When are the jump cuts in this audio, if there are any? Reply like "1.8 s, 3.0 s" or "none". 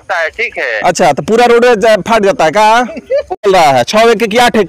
3.5 s